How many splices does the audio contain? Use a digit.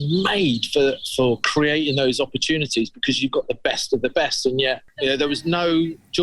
1